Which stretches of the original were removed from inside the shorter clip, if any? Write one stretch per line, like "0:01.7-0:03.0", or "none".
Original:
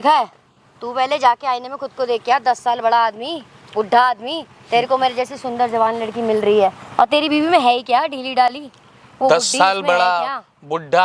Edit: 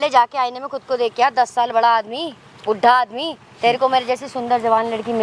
none

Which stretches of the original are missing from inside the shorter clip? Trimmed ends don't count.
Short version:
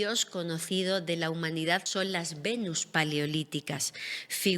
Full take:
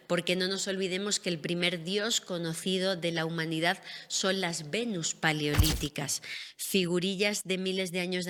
0:03.8-0:04.2

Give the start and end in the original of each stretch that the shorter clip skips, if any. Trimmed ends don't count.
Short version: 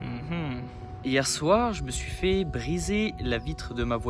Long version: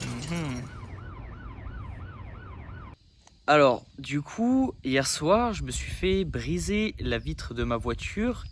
0:01.0-0:04.8

